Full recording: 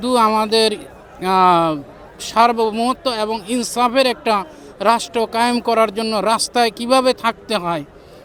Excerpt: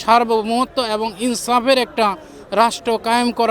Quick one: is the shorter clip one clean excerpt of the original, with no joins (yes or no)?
yes